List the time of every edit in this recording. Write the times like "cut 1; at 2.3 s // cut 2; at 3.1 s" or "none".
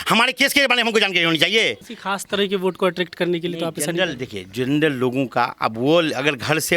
cut 1; at 1.9 s